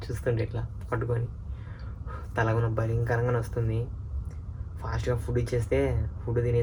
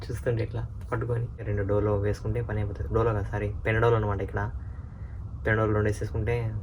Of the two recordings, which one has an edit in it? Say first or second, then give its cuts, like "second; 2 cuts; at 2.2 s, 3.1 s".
second; 1 cut; at 1.5 s